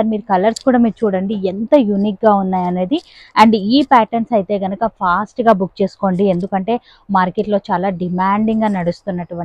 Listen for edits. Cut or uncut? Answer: uncut